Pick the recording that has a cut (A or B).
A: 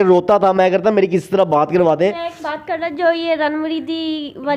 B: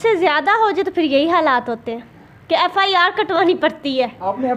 A